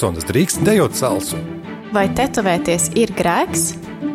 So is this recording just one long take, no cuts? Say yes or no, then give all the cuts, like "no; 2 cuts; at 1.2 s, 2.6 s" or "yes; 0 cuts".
yes; 0 cuts